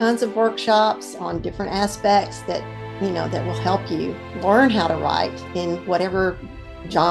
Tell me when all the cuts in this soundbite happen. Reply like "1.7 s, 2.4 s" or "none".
4.2 s

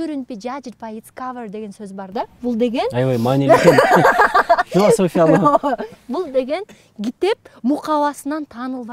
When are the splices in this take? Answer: none

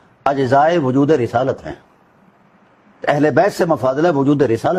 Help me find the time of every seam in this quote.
none

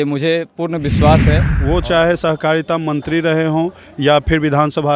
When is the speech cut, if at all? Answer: 1.5 s

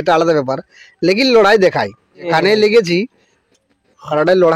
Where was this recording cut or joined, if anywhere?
2.3 s

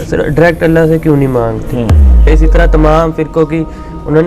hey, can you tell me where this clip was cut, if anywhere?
2.3 s

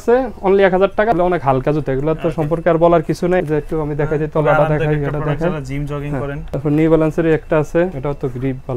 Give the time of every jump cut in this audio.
1.1 s, 3.4 s, 6.4 s, 8.0 s

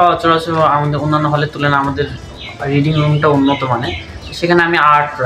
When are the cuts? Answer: none

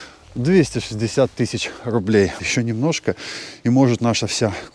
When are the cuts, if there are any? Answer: 2.4 s

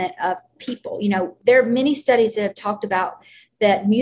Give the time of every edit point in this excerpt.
1.3 s

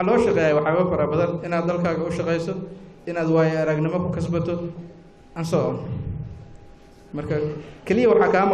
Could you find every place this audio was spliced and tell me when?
4.1 s

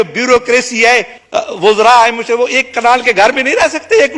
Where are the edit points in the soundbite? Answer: 1.2 s

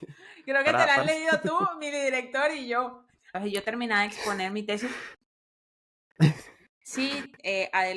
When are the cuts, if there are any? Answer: 3.2 s

